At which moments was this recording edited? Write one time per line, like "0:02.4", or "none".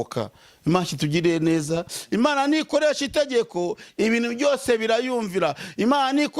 0:02.0